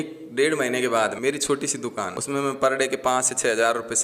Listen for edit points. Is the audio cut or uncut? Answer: cut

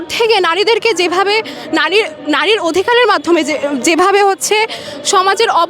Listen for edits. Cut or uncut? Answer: uncut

